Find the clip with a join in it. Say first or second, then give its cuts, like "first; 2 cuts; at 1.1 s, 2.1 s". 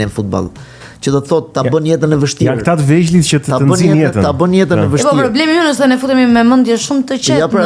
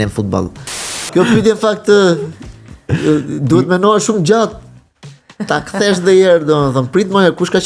second; 1 cut; at 1.1 s